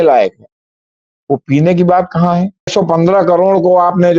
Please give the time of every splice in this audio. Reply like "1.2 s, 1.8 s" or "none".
2.7 s